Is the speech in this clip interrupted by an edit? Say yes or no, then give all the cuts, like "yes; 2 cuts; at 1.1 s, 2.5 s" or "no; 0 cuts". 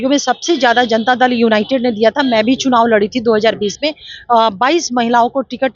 no; 0 cuts